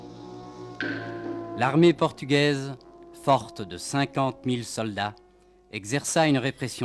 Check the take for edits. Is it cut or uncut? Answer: uncut